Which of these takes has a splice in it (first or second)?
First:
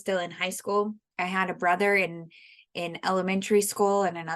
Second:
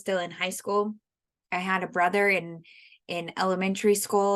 first